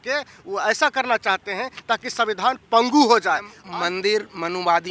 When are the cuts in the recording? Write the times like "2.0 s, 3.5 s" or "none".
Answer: 3.6 s